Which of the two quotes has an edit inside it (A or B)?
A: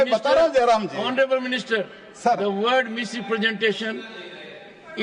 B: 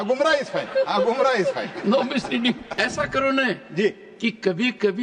B